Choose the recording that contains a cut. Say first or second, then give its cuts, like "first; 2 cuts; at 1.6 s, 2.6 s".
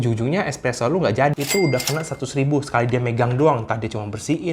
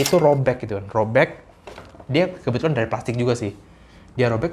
first; 1 cut; at 1.3 s